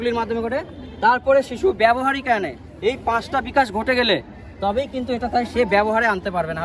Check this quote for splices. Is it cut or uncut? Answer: uncut